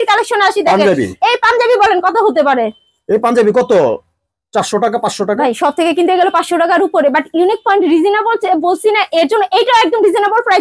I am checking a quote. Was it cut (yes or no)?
no